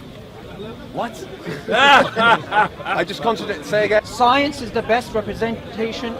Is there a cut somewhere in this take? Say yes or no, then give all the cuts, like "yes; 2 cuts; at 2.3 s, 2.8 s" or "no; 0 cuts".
yes; 1 cut; at 4.0 s